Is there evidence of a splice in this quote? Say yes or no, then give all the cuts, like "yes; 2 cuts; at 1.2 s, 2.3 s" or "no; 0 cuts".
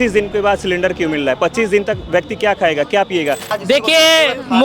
yes; 1 cut; at 3.5 s